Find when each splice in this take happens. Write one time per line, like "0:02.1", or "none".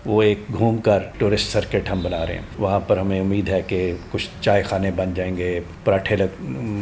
0:01.1
0:02.4
0:05.7